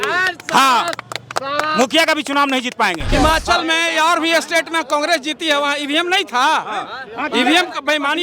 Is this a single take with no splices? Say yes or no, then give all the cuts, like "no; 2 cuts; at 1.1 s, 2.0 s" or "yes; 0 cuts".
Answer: no; 1 cut; at 3.0 s